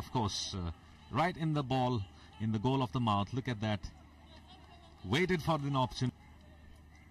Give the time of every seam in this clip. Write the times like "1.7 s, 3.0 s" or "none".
6.1 s